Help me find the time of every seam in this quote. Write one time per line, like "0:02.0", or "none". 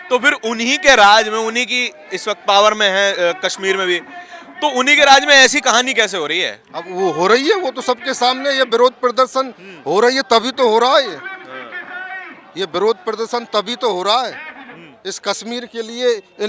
none